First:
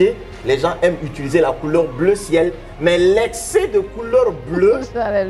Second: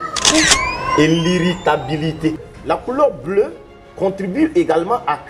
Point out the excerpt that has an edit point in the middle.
second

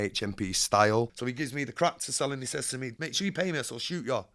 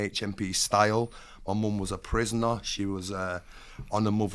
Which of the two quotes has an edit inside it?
first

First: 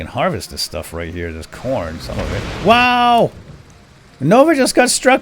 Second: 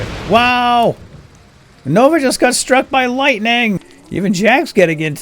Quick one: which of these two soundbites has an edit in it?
second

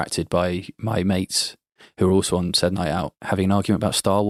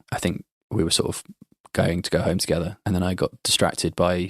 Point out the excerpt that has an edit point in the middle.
second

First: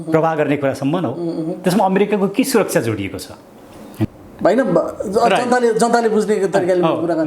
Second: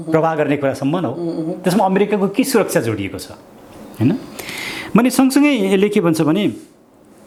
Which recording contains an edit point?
first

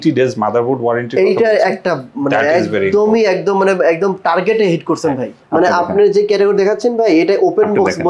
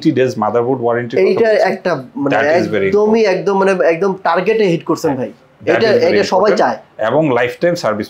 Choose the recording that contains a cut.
first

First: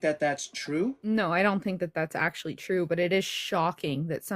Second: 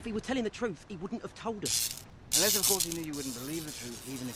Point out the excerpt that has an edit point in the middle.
first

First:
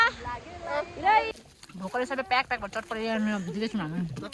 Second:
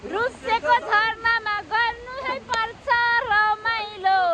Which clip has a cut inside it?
first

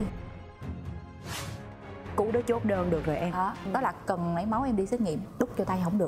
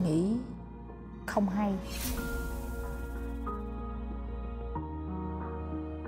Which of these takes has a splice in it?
first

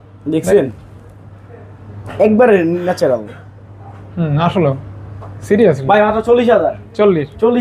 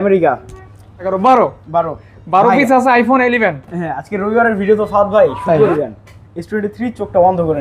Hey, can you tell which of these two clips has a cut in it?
second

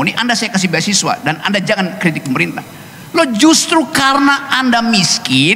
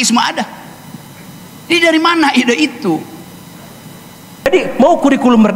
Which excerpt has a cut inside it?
second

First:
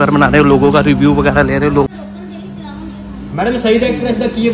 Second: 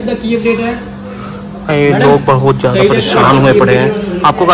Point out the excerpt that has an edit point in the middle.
first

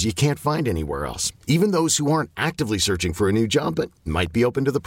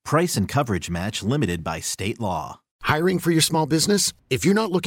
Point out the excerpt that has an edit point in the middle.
second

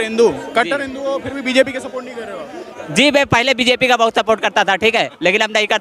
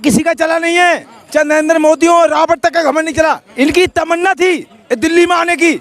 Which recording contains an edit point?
second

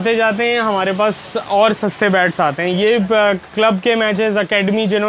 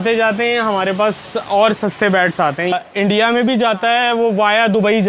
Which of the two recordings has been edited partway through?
second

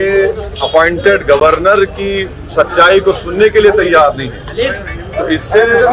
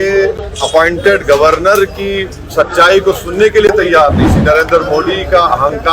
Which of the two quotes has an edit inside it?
second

